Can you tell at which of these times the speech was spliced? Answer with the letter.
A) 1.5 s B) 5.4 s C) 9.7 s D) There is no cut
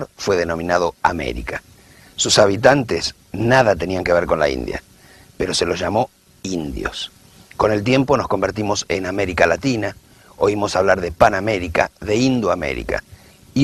C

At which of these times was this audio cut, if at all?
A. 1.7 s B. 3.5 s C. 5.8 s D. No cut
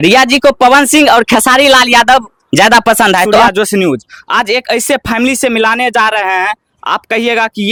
D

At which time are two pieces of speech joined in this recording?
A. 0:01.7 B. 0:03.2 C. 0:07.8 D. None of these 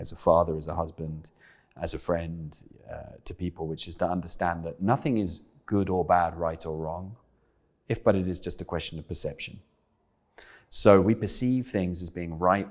A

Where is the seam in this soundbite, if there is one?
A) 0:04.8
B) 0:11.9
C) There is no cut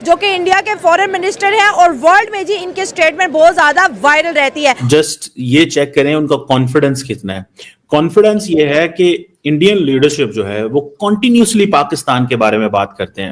A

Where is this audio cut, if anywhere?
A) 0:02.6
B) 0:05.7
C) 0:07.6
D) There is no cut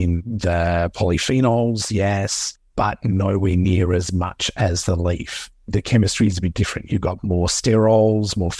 B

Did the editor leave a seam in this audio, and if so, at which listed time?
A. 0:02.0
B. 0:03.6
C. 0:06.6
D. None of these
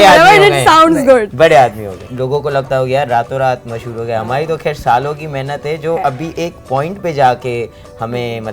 A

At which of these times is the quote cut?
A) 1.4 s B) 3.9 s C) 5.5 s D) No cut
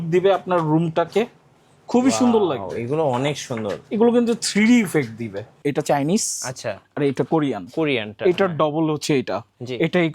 C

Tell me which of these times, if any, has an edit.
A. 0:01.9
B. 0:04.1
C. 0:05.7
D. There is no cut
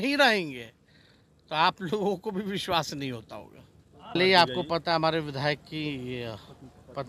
B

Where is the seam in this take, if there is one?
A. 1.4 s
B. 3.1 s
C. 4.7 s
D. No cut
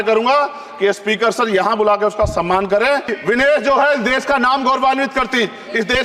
B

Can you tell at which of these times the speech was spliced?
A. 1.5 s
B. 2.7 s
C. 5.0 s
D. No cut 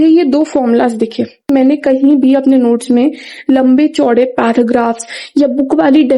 A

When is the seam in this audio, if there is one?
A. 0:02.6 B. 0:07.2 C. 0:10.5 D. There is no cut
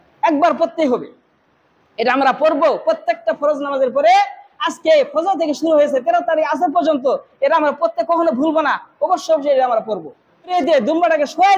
C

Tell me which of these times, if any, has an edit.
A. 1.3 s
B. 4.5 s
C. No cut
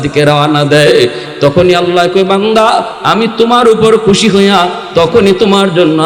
A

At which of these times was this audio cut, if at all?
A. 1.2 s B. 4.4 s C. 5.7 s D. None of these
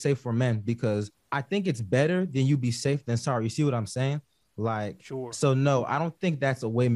A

